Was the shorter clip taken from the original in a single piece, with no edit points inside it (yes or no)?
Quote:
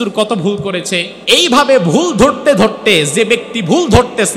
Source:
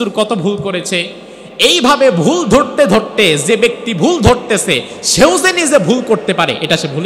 no